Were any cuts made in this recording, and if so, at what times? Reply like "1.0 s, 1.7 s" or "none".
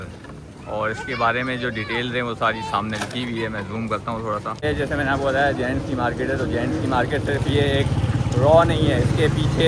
4.6 s